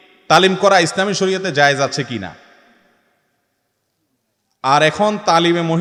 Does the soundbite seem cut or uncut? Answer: uncut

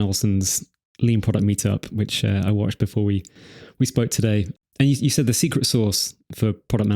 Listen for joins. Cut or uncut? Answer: cut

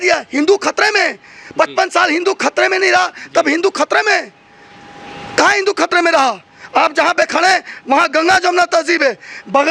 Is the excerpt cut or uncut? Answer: uncut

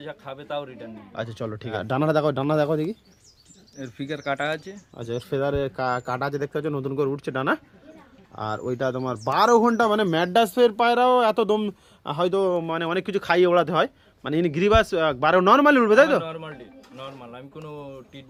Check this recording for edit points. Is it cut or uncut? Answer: uncut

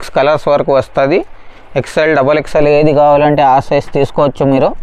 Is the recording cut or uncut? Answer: uncut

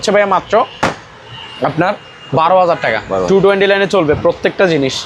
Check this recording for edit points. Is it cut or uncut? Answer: uncut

